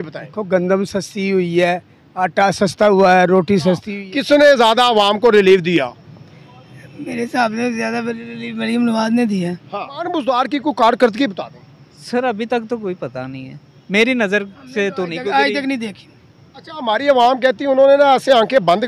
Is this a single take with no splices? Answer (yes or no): no